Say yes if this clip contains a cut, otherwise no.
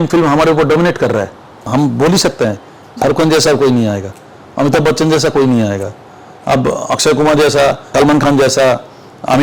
yes